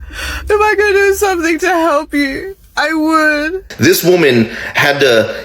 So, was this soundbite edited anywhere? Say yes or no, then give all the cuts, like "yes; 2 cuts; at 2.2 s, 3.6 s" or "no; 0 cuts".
yes; 1 cut; at 3.6 s